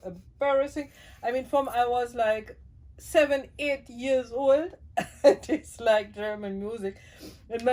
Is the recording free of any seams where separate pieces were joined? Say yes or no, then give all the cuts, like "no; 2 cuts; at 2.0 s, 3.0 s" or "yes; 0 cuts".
yes; 0 cuts